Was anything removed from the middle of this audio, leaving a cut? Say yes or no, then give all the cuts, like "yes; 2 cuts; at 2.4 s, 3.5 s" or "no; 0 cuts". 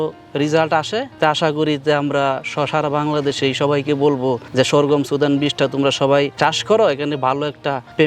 no; 0 cuts